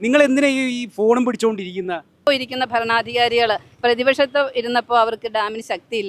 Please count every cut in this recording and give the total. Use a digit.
1